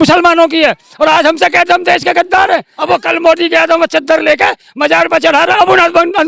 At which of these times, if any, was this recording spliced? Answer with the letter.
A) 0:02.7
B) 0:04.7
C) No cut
A